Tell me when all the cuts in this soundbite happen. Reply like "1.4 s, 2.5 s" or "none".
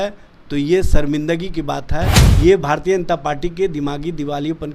2.2 s